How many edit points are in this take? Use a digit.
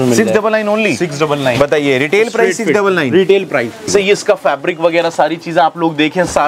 1